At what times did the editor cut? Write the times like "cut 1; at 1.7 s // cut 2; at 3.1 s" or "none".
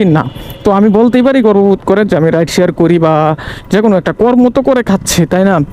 none